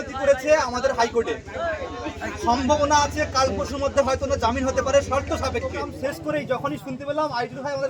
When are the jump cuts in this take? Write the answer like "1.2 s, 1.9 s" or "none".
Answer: 5.9 s